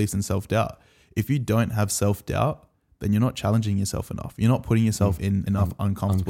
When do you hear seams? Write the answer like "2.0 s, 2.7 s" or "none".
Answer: 5.3 s